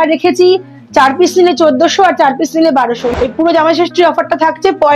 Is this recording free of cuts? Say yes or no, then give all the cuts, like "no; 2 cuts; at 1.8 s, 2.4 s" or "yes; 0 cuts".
no; 1 cut; at 3.0 s